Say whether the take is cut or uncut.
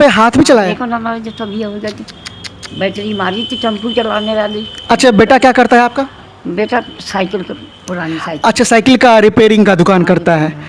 uncut